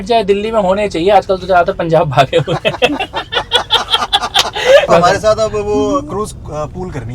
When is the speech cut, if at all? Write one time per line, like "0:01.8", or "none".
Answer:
0:04.9